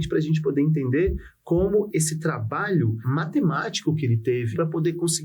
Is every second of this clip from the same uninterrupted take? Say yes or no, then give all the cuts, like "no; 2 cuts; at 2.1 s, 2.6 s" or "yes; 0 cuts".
no; 3 cuts; at 1.9 s, 3.0 s, 4.5 s